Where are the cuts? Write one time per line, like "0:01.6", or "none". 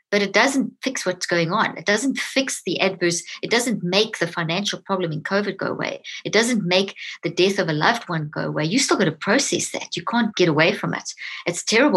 0:10.3